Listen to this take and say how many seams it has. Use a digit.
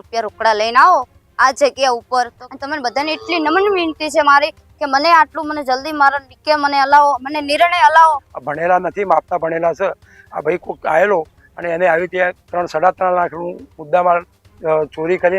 2